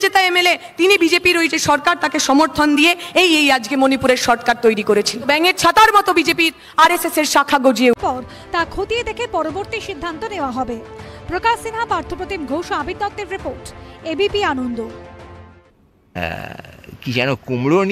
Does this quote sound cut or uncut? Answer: cut